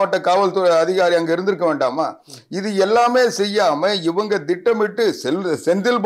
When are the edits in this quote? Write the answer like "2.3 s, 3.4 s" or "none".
none